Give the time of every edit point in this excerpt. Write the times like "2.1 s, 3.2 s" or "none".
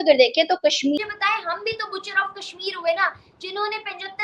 1.0 s